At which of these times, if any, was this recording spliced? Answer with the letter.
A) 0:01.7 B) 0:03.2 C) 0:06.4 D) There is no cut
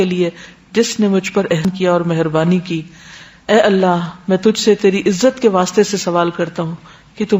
A